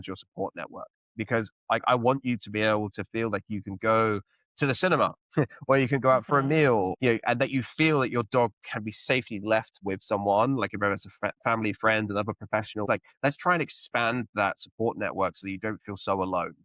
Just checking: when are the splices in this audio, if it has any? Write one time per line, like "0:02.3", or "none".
0:06.9
0:09.8
0:12.9